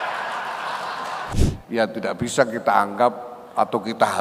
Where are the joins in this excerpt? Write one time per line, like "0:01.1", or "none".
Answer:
0:01.3